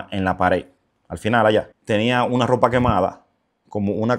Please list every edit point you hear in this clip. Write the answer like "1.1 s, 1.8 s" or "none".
1.8 s